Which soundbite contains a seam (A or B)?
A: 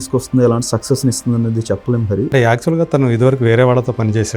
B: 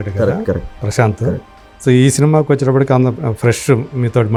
A